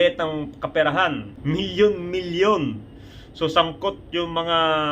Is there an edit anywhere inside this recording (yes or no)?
yes